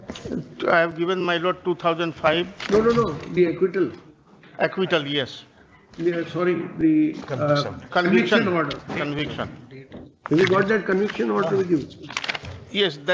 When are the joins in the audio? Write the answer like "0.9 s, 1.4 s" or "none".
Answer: none